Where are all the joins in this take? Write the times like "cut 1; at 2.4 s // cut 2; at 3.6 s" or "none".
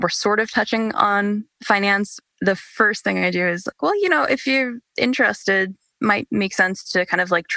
cut 1; at 1.9 s